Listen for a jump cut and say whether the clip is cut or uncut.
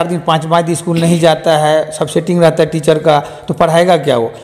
uncut